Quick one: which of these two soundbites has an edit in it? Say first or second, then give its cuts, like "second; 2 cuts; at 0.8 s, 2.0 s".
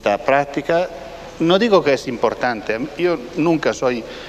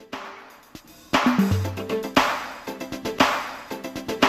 first; 1 cut; at 2.4 s